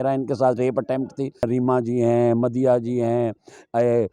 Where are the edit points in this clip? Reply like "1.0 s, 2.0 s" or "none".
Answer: 1.4 s